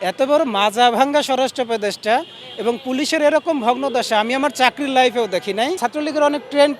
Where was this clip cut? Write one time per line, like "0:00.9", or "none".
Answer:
0:05.8